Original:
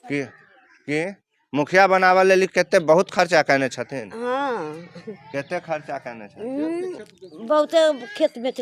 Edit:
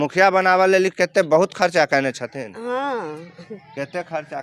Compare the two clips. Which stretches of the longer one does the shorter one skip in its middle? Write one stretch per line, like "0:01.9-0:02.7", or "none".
none